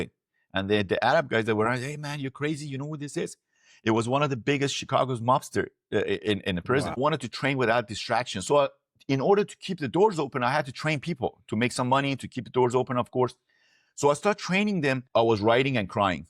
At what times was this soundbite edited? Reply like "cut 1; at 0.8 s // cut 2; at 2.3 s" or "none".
cut 1; at 7.0 s // cut 2; at 15.0 s